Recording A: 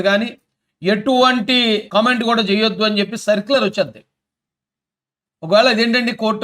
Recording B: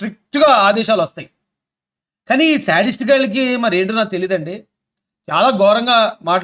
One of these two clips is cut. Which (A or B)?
A